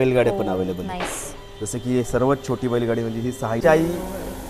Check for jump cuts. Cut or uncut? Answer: cut